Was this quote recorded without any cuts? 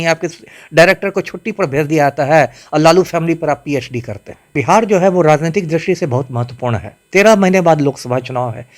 no; 1 cut; at 4.5 s

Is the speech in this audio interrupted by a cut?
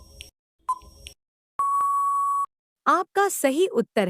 yes; 1 cut; at 2.6 s

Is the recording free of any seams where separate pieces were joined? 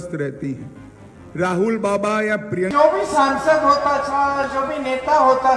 no; 1 cut; at 2.7 s

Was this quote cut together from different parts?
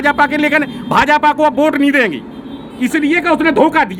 no; 0 cuts

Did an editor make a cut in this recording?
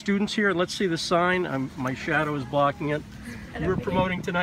no; 0 cuts

